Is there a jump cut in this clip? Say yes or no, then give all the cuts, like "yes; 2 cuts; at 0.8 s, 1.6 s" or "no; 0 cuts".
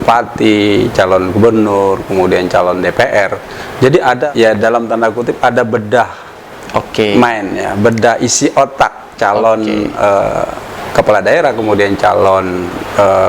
yes; 1 cut; at 4.2 s